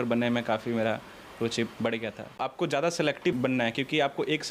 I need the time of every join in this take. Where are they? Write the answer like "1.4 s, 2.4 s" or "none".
2.4 s